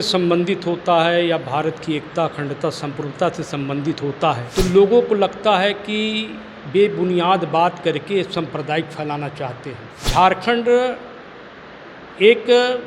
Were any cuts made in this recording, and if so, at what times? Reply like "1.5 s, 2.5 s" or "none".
4.5 s, 9.9 s